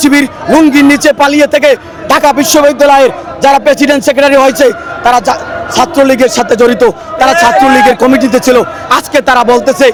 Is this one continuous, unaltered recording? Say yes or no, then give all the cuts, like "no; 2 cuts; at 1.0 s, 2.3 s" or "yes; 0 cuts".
yes; 0 cuts